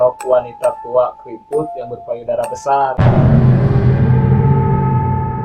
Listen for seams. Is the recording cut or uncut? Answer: uncut